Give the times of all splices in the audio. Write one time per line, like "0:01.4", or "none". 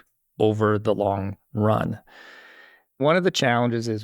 0:00.8
0:03.0